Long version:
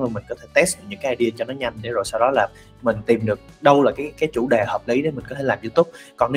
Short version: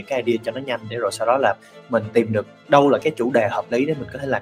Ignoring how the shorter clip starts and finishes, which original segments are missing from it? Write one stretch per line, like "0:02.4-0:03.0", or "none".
0:03.9-0:04.2